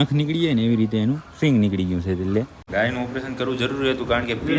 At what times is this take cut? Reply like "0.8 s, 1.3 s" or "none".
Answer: 2.6 s